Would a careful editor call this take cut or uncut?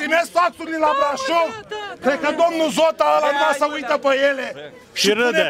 uncut